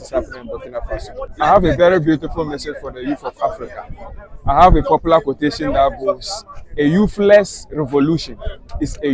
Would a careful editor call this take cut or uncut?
cut